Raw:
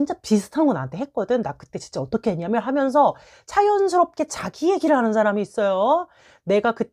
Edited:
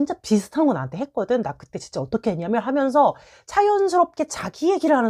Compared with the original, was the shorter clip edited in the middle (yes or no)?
no